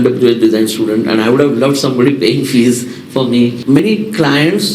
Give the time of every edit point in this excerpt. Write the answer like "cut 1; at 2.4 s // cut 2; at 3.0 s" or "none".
cut 1; at 3.7 s